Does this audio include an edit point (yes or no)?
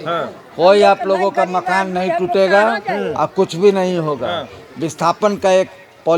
no